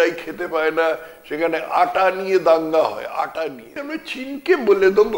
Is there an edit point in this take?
yes; 1 cut; at 3.8 s

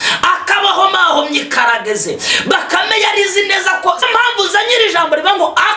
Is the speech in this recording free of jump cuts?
no; 1 cut; at 4.1 s

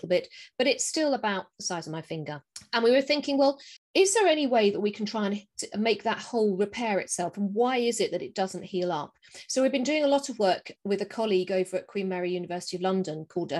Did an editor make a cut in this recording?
no; 0 cuts

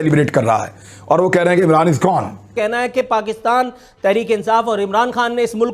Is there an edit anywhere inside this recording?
yes; 1 cut; at 2.5 s

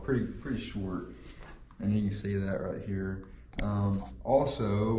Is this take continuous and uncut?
yes; 0 cuts

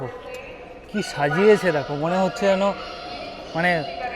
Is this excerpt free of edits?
yes; 0 cuts

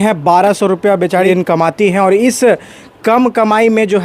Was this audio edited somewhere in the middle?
yes; 1 cut; at 1.3 s

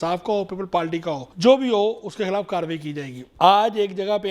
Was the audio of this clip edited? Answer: yes; 2 cuts; at 1.3 s, 3.2 s

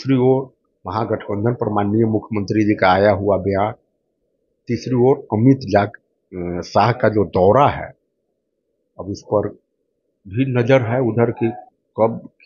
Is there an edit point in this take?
no; 0 cuts

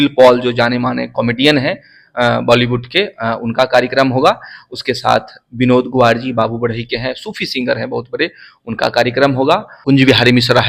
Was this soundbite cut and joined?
yes; 1 cut; at 9.7 s

